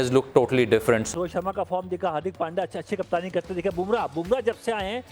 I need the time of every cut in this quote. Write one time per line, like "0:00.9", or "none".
0:01.1